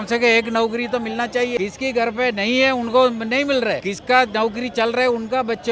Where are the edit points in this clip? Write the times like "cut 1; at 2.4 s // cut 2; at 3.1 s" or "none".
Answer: cut 1; at 1.6 s // cut 2; at 3.9 s